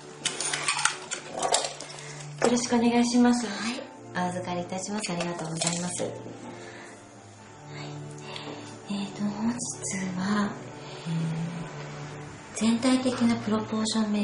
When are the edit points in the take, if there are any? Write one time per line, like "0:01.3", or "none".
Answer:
0:11.5